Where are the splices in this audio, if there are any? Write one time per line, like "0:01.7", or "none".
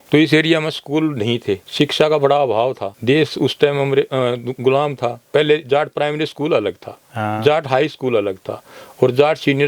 0:05.2